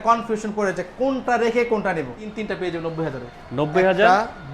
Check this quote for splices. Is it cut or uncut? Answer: cut